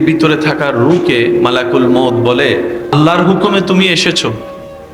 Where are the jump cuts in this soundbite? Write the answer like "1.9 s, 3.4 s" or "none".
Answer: 2.9 s